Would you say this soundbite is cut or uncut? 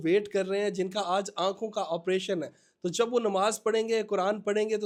uncut